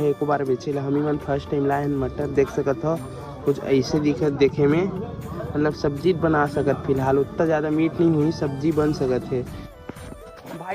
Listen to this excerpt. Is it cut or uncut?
cut